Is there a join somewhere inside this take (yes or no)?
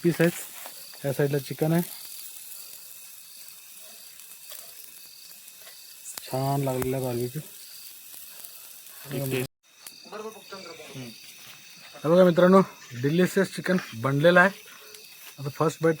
yes